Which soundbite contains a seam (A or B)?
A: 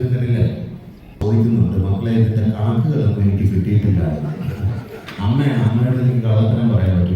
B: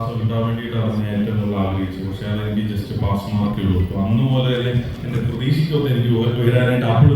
A